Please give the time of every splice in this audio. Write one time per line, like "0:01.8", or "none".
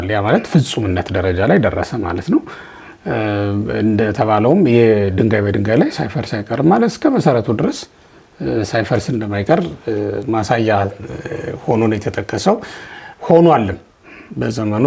none